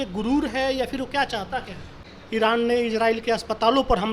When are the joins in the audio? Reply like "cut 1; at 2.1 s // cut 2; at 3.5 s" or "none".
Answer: cut 1; at 2.1 s